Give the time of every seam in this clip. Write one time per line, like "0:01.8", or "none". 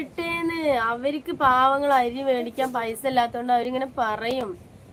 none